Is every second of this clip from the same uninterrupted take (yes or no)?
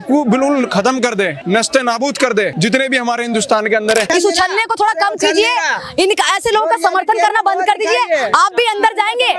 no